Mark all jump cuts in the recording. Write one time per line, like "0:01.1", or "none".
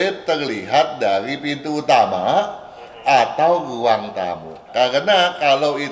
0:04.5